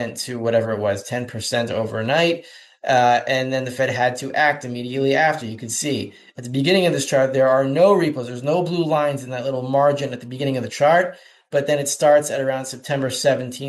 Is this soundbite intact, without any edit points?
yes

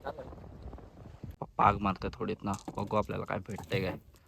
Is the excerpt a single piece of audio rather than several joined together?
no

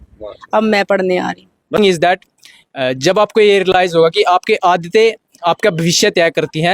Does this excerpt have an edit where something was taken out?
yes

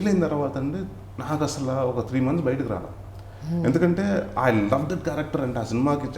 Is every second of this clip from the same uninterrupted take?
yes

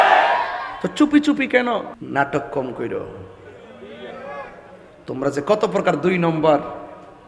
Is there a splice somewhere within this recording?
yes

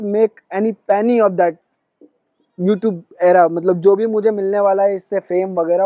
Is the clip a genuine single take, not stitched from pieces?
yes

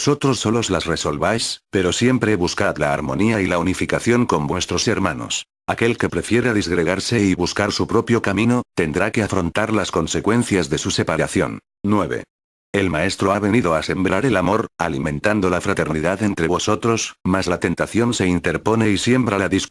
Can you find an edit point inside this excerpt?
yes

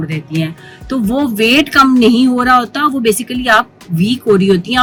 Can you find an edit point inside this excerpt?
no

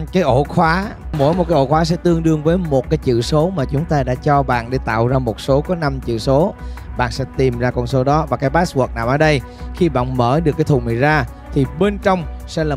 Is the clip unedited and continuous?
no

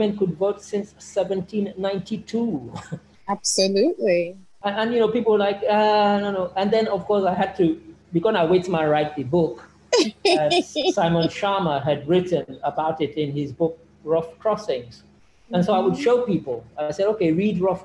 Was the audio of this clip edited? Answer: no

